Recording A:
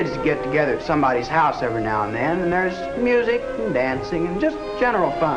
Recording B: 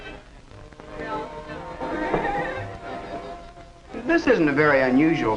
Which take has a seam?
B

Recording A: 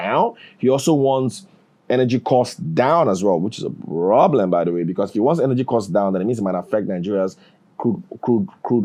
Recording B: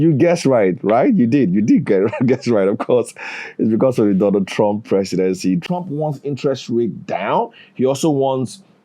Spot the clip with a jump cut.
B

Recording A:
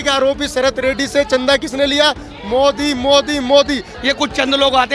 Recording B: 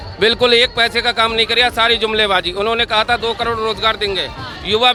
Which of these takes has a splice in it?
A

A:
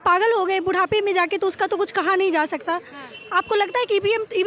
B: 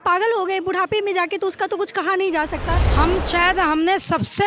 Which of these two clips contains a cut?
B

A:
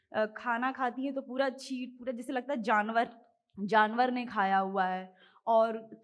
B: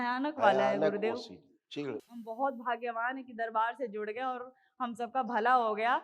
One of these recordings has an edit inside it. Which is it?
B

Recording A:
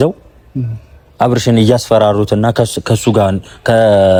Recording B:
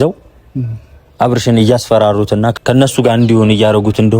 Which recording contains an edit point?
B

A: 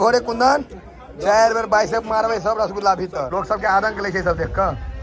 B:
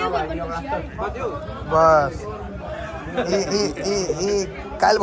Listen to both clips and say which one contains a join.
A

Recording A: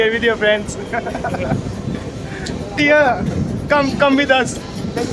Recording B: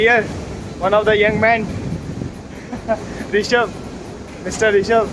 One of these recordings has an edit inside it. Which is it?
A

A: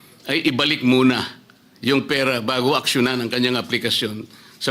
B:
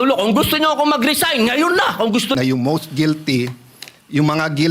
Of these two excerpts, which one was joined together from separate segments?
B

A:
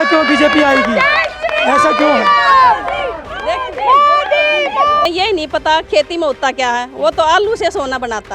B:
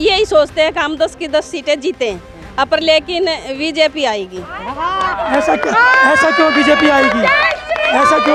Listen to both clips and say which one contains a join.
A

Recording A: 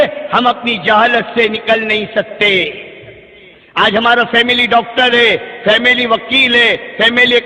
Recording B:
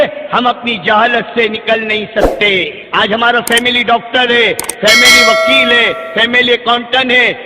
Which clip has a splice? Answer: B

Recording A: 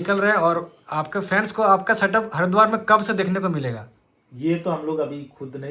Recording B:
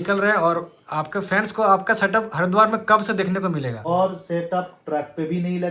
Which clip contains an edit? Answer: B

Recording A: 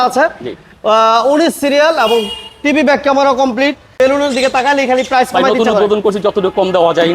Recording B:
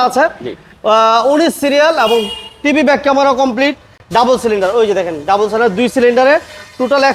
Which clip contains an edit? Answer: A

